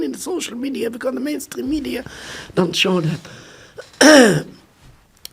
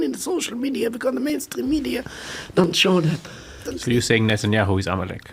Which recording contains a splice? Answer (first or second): second